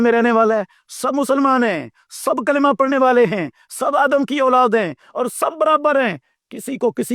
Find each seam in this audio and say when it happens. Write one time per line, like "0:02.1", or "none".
none